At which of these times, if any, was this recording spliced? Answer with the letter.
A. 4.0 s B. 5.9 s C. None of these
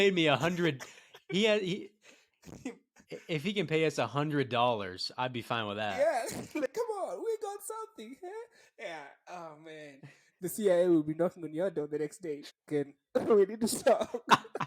B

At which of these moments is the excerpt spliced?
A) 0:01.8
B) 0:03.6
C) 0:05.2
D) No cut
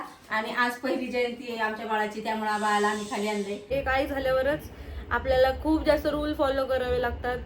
B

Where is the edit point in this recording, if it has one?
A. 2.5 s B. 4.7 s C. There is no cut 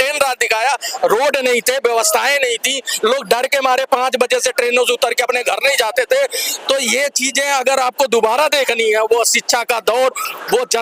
C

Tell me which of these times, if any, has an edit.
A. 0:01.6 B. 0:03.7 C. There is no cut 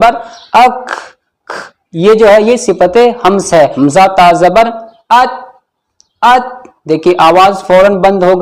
B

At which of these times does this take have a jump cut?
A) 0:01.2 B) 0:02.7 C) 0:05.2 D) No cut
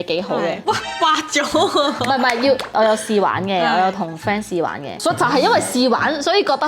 B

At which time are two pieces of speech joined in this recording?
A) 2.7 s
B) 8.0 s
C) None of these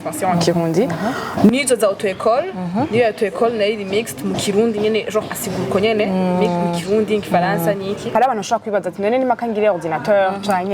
B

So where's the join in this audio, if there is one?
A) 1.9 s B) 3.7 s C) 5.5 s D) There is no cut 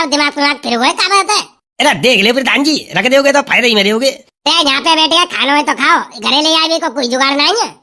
D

